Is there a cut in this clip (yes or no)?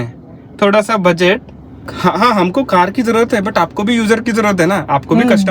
yes